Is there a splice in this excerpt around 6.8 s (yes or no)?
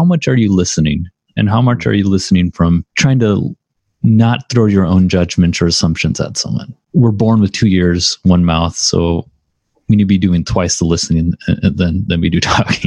yes